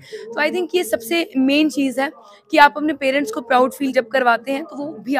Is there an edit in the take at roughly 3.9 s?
yes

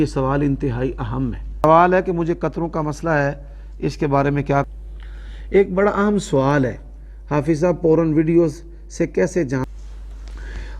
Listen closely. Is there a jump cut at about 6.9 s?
no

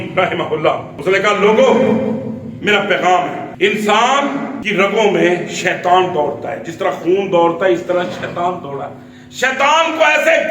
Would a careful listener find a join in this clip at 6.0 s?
no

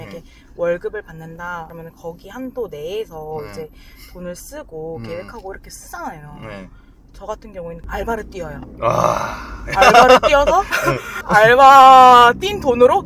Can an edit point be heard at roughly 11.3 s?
yes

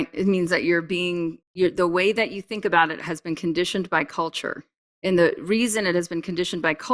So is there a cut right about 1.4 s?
yes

